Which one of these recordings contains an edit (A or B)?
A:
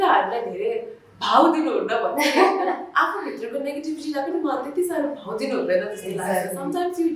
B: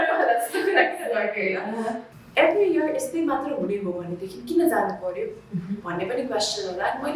B